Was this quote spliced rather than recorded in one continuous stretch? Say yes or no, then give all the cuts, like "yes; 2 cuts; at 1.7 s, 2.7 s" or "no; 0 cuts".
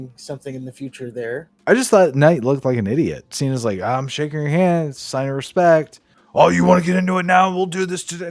yes; 2 cuts; at 1.5 s, 3.3 s